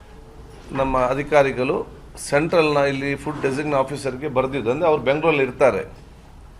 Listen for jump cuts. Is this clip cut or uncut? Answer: uncut